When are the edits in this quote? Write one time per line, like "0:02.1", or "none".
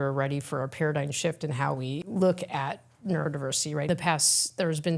0:02.0
0:03.9

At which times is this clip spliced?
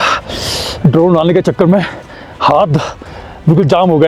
none

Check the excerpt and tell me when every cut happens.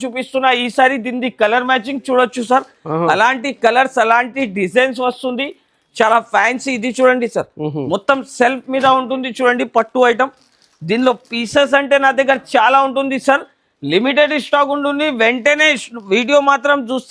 none

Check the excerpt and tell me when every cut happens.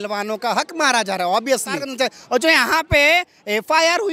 0:01.9

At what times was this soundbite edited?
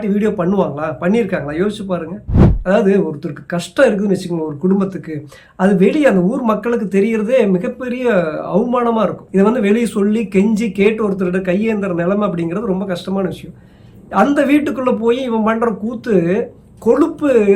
0:02.5
0:09.2

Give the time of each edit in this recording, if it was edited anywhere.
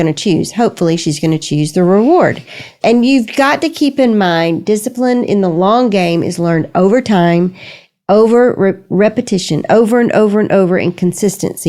none

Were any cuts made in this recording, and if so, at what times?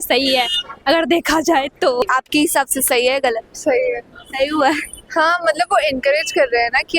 0:02.0

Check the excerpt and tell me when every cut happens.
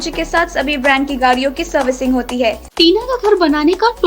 0:02.7

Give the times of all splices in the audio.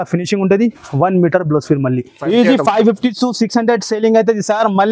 0:02.2

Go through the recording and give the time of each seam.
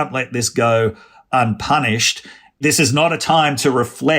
0:02.4

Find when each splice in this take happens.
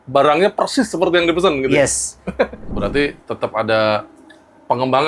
0:02.6

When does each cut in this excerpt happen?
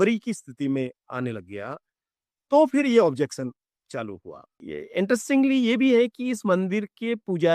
0:04.5

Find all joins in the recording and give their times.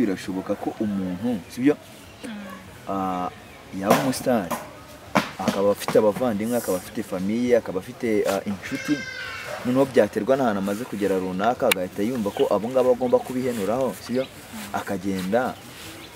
none

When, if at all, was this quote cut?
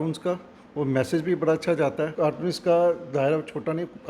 0:02.1

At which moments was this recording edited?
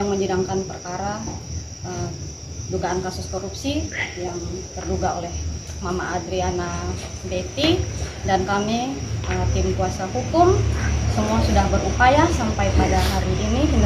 none

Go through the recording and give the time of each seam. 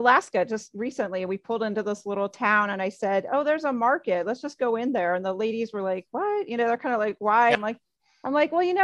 0:07.6

